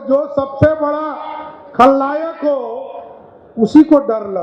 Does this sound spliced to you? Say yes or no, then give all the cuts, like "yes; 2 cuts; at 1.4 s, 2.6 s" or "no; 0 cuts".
no; 0 cuts